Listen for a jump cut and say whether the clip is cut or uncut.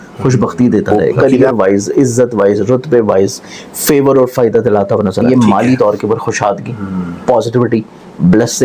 cut